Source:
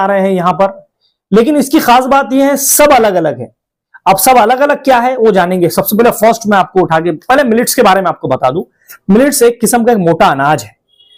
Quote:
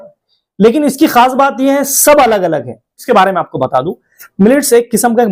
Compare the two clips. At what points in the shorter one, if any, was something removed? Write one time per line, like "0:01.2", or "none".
0:03.0